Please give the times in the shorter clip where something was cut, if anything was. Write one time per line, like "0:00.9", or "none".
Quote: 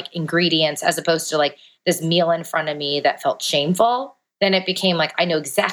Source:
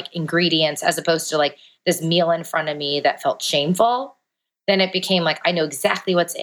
0:04.2